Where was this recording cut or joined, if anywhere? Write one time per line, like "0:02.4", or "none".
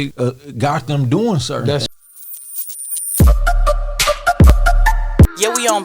0:01.9